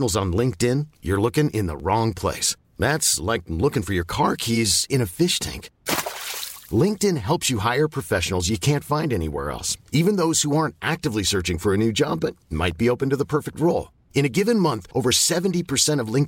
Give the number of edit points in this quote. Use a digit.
0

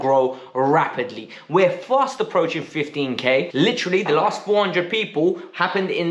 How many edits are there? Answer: 1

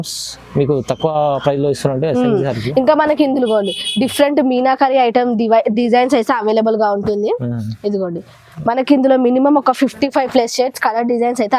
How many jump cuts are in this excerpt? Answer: 0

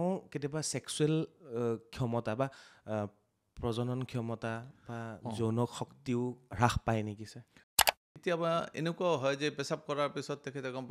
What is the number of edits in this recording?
1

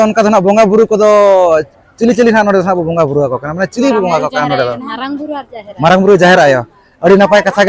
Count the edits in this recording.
0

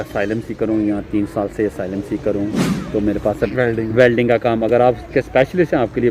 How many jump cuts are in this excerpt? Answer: 1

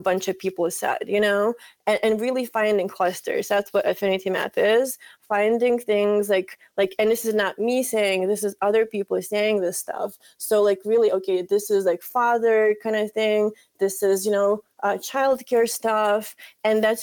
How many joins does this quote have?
0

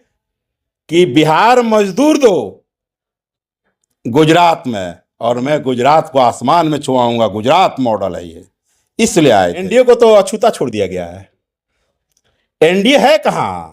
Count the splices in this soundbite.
1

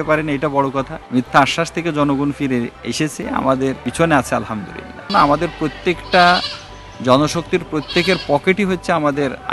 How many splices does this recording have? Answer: 4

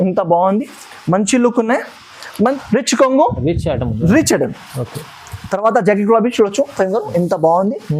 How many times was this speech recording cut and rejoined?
1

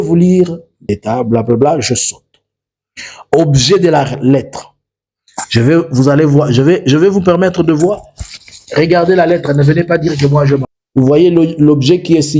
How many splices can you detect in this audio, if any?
2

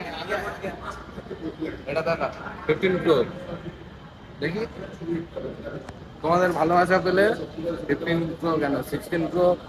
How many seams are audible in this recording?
0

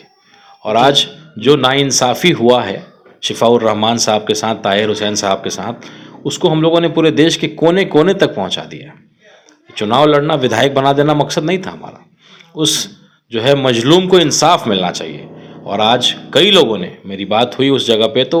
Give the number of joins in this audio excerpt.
0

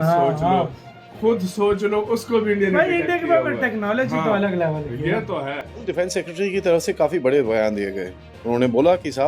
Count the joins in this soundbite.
1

